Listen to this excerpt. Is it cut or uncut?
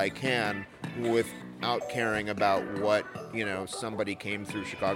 uncut